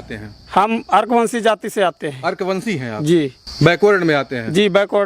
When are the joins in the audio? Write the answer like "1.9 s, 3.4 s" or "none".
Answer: none